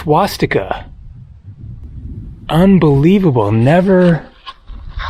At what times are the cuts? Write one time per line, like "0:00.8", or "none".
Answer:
0:01.9